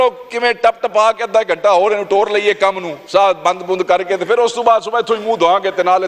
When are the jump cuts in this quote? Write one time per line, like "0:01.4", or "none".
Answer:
none